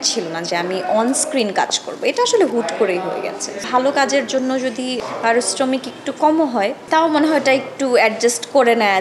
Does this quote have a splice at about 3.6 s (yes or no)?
yes